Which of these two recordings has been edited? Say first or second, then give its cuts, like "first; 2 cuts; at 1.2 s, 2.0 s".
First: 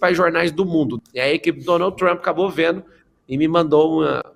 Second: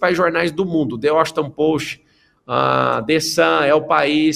first; 1 cut; at 0.9 s